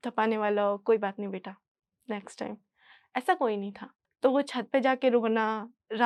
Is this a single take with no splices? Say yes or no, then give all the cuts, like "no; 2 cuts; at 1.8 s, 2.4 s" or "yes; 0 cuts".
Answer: yes; 0 cuts